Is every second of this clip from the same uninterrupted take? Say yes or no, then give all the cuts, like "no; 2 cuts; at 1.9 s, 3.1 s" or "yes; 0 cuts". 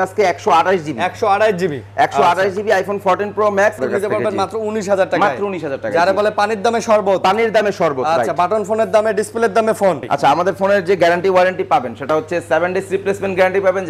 no; 2 cuts; at 3.8 s, 10.1 s